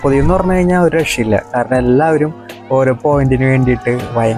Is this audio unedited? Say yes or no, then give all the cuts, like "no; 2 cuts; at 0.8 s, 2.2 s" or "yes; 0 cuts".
yes; 0 cuts